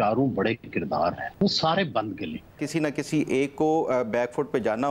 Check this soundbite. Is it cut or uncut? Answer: cut